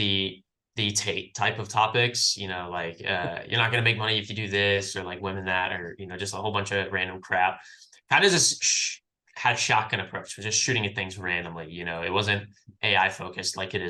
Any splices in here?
no; 0 cuts

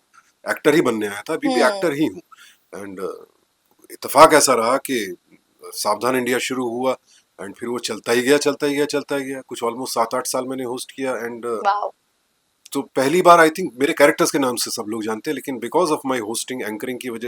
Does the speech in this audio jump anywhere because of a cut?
no; 0 cuts

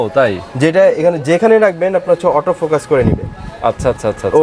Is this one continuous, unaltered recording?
yes; 0 cuts

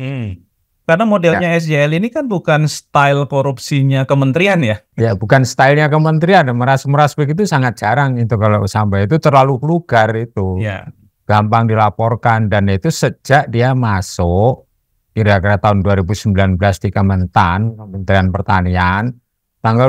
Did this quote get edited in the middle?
yes; 2 cuts; at 0.8 s, 4.9 s

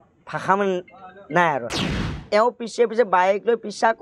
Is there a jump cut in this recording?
yes; 1 cut; at 2.1 s

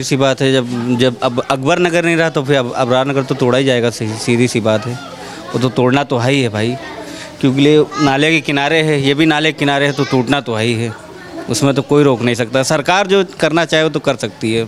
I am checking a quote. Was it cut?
no; 0 cuts

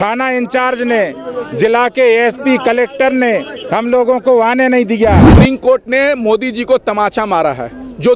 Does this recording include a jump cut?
yes; 1 cut; at 5.2 s

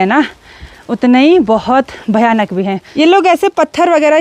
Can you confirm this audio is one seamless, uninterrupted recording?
no; 1 cut; at 2.8 s

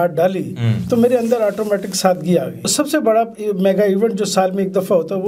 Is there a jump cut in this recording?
yes; 1 cut; at 2.7 s

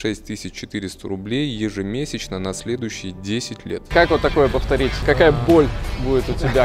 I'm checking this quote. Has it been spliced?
yes; 2 cuts; at 3.9 s, 5.0 s

